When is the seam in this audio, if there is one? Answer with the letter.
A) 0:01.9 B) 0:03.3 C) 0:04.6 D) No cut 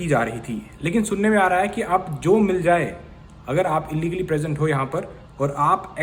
D